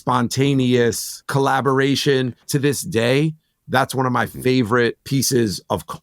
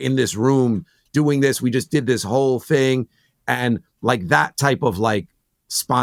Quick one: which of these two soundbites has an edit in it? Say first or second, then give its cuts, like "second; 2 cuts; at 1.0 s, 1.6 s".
first; 3 cuts; at 1.1 s, 2.5 s, 5.0 s